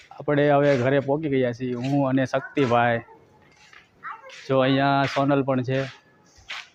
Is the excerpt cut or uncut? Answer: uncut